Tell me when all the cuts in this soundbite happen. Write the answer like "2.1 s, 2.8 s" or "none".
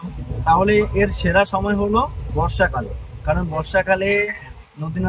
none